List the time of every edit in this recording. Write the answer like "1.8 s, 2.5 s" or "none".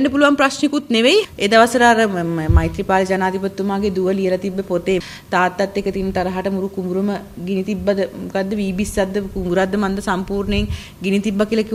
1.3 s, 5.0 s